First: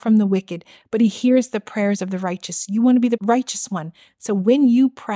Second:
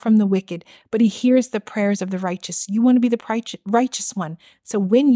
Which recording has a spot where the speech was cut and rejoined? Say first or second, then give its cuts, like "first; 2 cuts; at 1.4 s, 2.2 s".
first; 1 cut; at 3.2 s